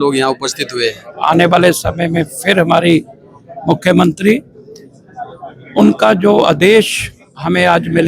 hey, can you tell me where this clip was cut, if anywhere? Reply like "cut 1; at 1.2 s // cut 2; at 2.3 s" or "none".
cut 1; at 1.1 s